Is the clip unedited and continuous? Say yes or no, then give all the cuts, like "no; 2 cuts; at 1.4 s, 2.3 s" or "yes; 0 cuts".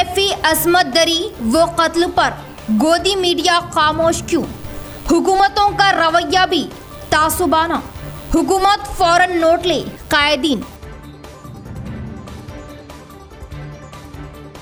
yes; 0 cuts